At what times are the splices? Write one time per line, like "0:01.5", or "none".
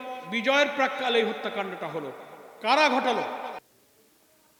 none